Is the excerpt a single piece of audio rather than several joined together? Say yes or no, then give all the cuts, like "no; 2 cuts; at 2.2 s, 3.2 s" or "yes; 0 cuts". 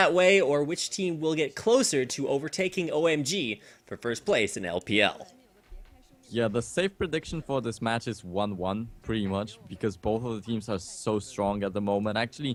yes; 0 cuts